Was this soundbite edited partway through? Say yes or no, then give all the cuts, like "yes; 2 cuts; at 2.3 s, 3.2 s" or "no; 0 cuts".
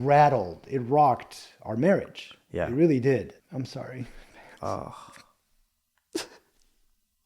yes; 1 cut; at 3.4 s